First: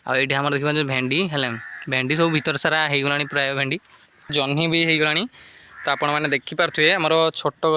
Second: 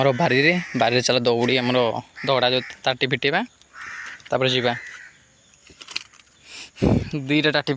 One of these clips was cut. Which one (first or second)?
first